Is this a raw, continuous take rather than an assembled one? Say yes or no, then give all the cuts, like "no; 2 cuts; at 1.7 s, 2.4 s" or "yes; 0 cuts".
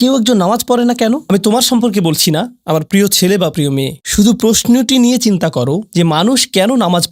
yes; 0 cuts